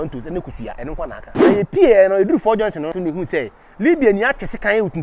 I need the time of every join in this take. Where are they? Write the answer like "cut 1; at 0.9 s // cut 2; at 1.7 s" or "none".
cut 1; at 1.3 s // cut 2; at 3.0 s